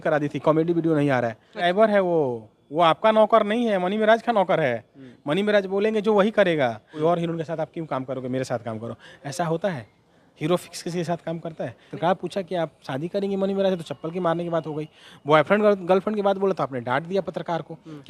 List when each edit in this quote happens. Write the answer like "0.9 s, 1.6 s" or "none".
1.6 s, 6.9 s, 11.9 s